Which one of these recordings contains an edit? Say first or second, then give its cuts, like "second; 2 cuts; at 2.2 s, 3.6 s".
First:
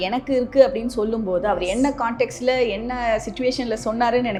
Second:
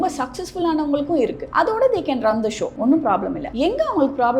second; 3 cuts; at 1.4 s, 2.7 s, 3.4 s